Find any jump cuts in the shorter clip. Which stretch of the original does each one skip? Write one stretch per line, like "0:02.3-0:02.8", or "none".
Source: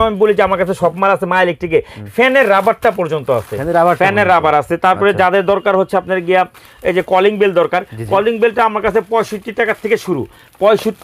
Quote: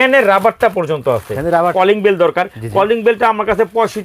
0:03.9-0:07.1